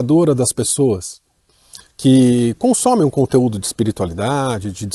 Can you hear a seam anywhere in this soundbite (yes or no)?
no